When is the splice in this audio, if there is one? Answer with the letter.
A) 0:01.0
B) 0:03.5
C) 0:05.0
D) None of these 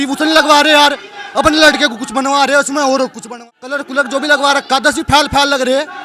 B